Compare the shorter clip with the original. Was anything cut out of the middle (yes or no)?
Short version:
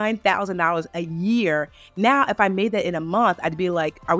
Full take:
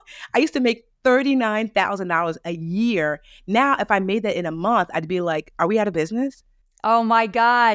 no